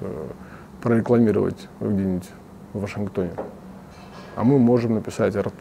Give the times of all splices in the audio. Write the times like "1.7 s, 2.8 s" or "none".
none